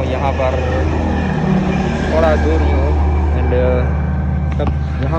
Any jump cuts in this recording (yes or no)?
no